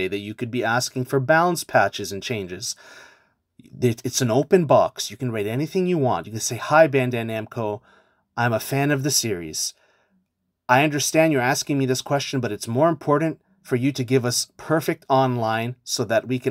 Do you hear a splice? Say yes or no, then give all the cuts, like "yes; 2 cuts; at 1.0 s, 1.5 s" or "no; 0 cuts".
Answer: no; 0 cuts